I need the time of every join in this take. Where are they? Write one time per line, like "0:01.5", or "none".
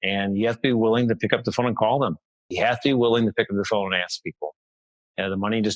0:02.5